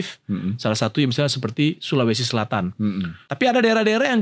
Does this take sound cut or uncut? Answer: cut